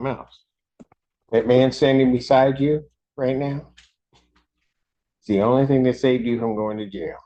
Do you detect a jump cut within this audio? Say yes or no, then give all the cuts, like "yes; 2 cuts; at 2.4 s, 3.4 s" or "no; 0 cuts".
no; 0 cuts